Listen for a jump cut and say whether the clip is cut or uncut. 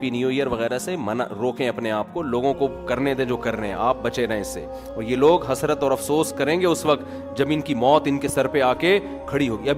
uncut